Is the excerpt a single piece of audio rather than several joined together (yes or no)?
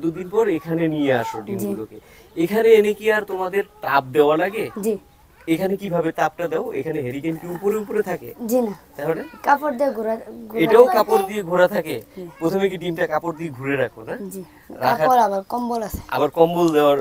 yes